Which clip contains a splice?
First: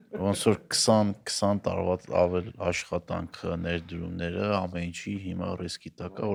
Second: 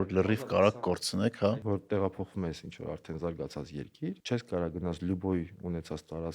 second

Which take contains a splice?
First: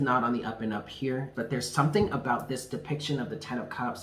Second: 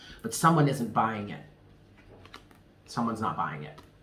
first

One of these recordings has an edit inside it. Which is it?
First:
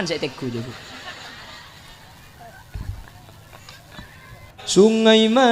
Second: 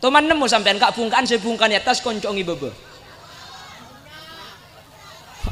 first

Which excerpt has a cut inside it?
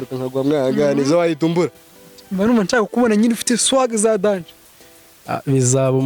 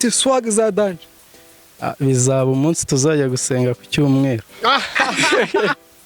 first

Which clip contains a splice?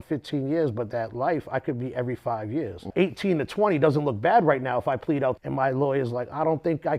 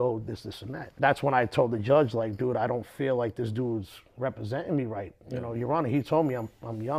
first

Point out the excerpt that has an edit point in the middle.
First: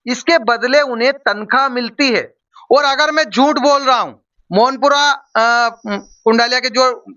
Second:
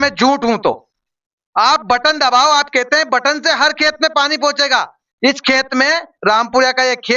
first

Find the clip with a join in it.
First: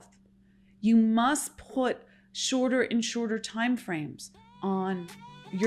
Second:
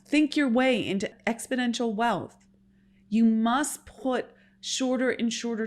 second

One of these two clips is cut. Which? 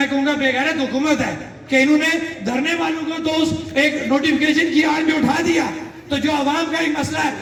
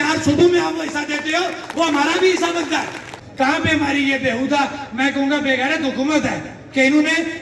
second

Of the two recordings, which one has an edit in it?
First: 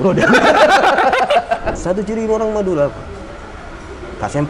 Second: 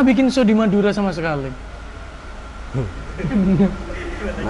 first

